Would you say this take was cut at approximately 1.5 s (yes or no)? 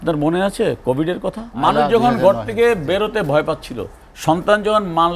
yes